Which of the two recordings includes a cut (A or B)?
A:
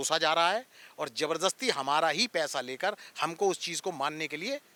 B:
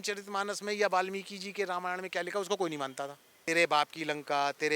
B